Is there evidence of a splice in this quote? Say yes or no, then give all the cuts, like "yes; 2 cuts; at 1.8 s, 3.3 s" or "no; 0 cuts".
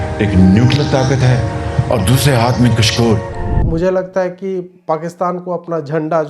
yes; 1 cut; at 3.6 s